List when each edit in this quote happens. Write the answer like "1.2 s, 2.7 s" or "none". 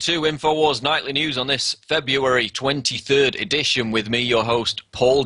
2.1 s